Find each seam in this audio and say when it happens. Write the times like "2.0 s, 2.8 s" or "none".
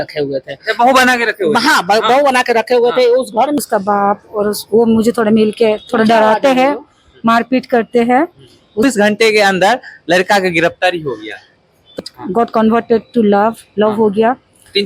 3.6 s, 8.8 s, 12.0 s